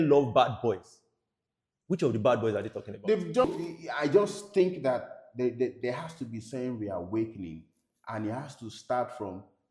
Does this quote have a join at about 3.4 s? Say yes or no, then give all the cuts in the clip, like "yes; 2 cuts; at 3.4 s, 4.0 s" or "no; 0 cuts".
yes; 1 cut; at 3.4 s